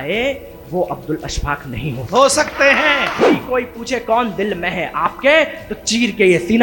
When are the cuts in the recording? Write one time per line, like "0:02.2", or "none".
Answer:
0:03.3